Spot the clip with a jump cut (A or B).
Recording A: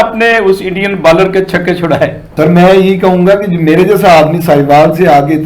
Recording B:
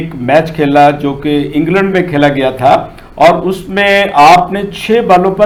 A